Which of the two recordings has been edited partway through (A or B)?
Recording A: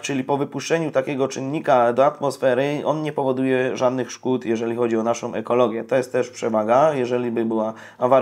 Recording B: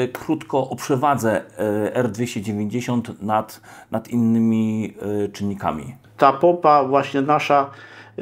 B